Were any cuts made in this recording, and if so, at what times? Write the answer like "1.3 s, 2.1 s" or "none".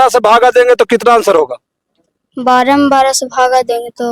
none